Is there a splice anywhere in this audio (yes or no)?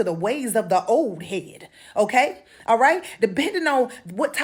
no